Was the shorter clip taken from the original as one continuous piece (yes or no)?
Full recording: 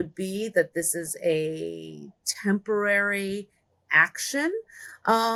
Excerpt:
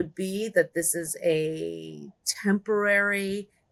yes